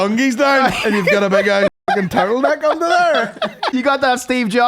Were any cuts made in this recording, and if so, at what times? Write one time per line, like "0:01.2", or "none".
0:03.6